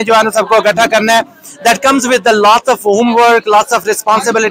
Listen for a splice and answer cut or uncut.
uncut